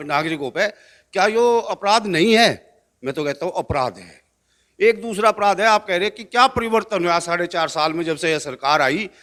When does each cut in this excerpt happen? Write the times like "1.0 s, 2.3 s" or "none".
none